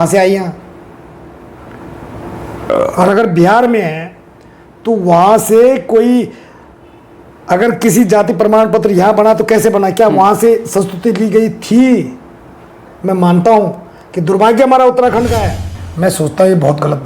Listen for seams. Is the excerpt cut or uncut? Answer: cut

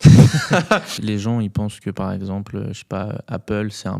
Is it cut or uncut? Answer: cut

